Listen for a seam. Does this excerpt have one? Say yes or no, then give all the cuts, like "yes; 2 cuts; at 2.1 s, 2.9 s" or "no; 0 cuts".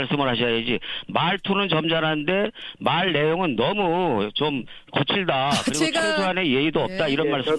no; 0 cuts